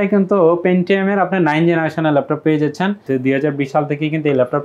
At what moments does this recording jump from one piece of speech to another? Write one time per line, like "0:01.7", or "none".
0:03.0